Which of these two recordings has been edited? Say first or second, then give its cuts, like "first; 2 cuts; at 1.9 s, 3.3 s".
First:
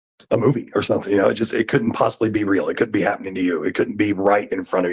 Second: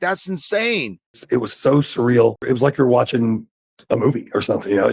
second; 2 cuts; at 1.2 s, 2.4 s